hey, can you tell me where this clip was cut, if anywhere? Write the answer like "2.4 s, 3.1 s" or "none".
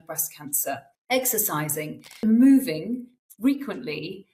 0.9 s, 2.2 s